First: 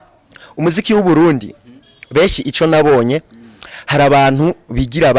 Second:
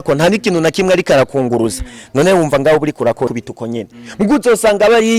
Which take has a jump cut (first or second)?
second